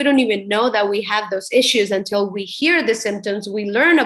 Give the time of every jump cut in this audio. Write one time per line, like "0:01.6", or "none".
none